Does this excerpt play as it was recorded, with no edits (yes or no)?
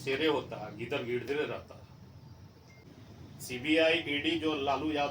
no